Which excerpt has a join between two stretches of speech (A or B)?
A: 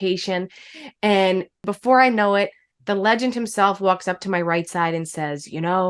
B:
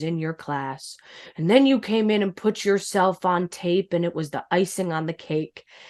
A